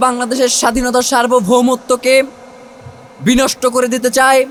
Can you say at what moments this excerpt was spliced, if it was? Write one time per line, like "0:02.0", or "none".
none